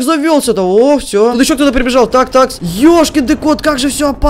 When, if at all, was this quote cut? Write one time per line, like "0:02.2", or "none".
0:01.3

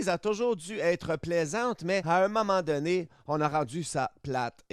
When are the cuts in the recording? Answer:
0:02.0

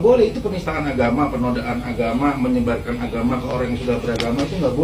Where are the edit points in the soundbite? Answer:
none

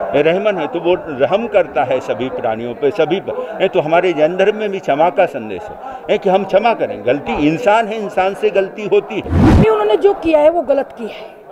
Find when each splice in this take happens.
0:09.4

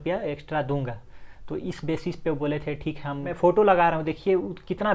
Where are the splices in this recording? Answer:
0:03.3

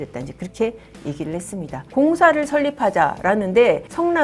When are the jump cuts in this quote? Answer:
0:01.8

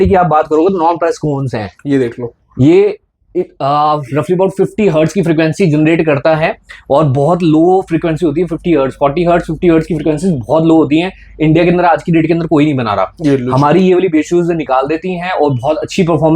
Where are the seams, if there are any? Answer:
none

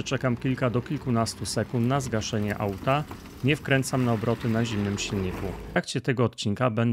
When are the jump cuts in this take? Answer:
0:05.8

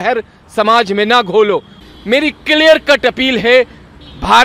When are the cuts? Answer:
0:01.8

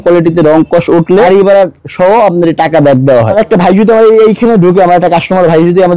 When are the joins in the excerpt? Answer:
0:01.3
0:03.3

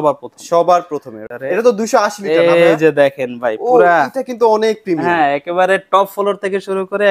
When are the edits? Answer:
0:01.1

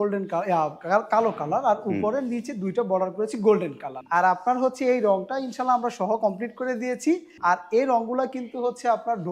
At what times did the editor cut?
0:03.9
0:07.3

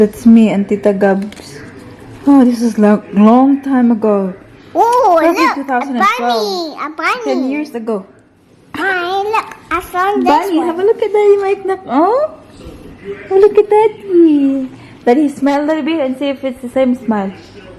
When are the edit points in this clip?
none

